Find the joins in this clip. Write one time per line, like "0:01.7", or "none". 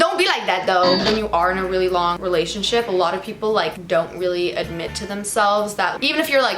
0:01.0
0:02.2
0:03.8